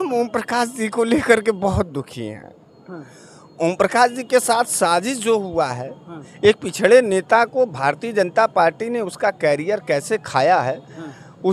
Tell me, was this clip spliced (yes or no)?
no